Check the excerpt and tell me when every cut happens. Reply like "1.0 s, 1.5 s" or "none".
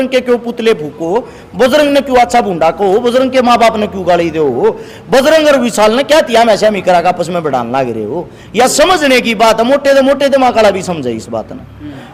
none